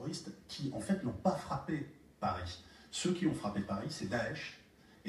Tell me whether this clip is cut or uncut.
uncut